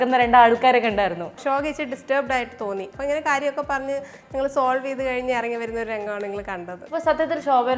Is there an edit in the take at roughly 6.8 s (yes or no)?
yes